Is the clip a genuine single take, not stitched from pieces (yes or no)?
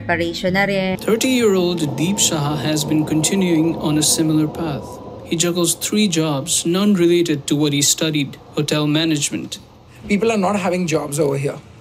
no